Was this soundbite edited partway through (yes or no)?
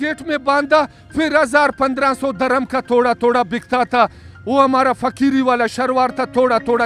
no